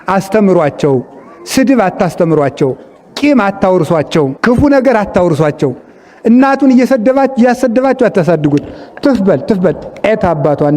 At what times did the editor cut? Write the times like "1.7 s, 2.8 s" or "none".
4.3 s